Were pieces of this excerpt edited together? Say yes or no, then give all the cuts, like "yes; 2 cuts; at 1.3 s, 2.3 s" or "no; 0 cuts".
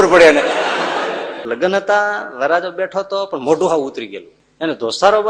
yes; 1 cut; at 1.5 s